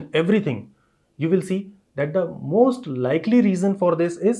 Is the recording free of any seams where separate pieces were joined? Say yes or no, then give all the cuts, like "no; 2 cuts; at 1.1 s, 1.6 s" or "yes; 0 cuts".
yes; 0 cuts